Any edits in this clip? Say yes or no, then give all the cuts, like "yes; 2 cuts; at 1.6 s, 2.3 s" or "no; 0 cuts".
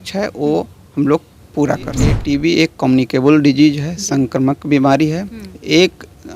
yes; 1 cut; at 2.1 s